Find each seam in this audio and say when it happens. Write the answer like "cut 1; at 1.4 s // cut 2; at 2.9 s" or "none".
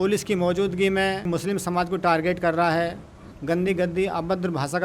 cut 1; at 1.2 s